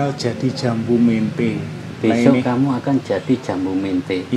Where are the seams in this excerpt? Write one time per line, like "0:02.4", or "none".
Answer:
0:01.8